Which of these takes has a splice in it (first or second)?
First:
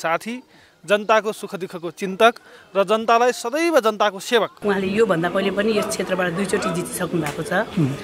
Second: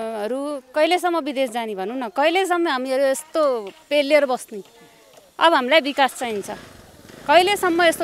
first